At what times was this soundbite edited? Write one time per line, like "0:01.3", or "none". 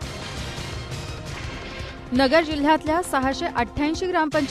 0:02.0